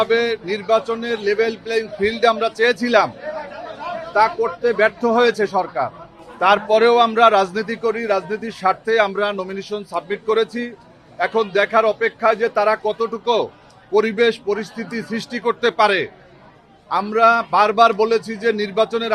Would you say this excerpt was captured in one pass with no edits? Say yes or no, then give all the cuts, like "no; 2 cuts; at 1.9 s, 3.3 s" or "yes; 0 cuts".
yes; 0 cuts